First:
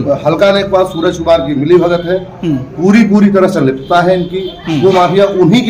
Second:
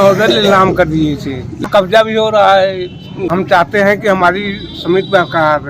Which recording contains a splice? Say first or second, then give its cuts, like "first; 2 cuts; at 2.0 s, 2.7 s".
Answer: second; 2 cuts; at 1.6 s, 3.2 s